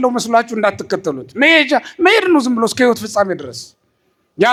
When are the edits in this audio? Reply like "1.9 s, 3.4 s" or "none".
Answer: none